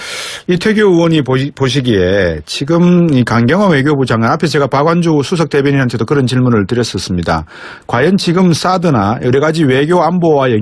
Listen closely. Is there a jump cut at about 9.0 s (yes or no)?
no